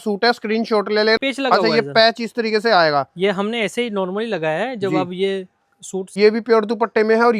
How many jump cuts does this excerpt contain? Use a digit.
2